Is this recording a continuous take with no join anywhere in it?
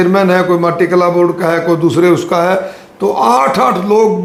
yes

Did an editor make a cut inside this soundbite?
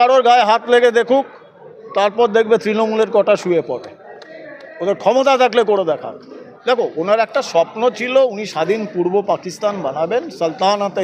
yes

